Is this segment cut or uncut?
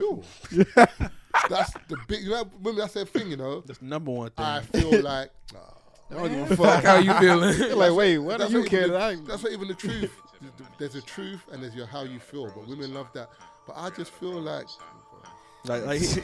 uncut